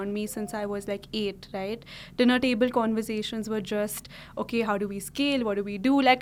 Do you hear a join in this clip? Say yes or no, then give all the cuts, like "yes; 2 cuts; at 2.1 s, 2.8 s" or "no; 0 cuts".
no; 0 cuts